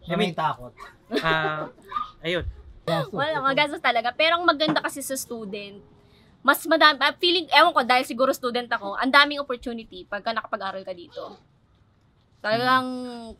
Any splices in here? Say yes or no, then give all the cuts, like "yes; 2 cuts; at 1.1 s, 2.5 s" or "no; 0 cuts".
yes; 1 cut; at 2.7 s